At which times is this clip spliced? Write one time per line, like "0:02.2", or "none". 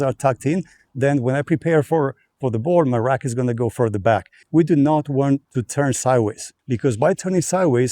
0:04.4
0:05.6
0:06.5